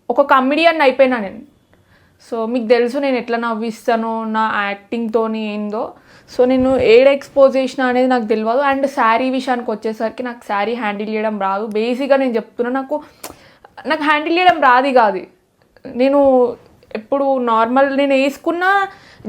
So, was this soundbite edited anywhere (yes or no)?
no